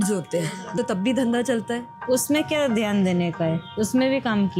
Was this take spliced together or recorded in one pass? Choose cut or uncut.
cut